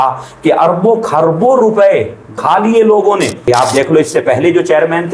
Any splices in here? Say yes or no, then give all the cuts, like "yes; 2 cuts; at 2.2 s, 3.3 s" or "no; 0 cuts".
yes; 2 cuts; at 2.4 s, 3.5 s